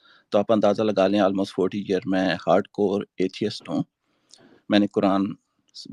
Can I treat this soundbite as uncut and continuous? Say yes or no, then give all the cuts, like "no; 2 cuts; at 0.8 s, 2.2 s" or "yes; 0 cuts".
yes; 0 cuts